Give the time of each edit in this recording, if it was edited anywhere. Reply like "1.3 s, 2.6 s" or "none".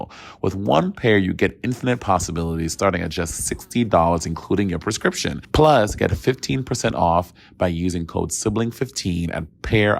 5.3 s